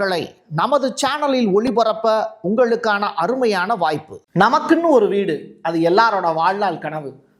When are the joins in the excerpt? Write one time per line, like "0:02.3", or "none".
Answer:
0:04.2